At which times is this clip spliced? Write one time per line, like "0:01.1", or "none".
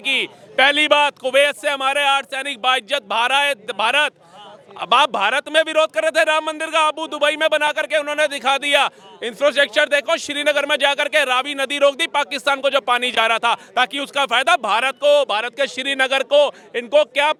none